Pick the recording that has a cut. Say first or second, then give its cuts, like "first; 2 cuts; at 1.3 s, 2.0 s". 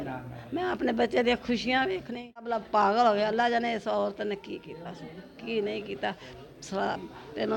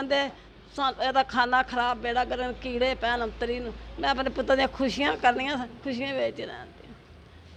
first; 1 cut; at 2.6 s